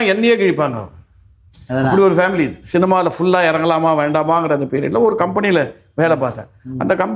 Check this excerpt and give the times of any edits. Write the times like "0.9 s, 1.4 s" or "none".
2.6 s